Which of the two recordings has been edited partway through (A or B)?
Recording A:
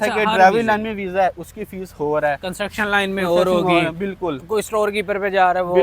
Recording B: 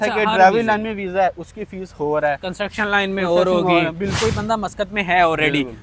B